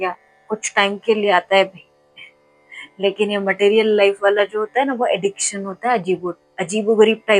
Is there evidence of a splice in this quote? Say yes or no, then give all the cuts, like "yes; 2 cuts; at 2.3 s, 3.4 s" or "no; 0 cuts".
no; 0 cuts